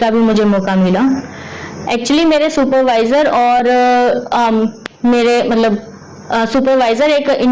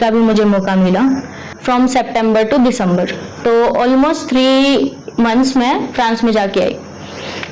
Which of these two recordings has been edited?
second; 1 cut; at 1.5 s

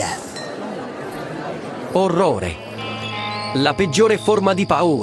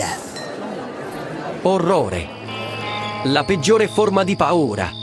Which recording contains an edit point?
second; 1 cut; at 1.6 s

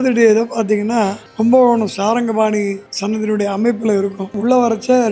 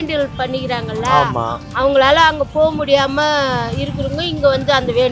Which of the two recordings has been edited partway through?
first; 3 cuts; at 1.2 s, 2.9 s, 4.3 s

